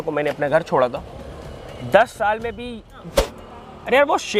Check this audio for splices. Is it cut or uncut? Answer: cut